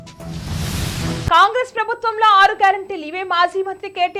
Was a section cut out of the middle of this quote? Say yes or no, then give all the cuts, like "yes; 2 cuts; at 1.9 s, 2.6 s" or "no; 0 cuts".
yes; 1 cut; at 0.9 s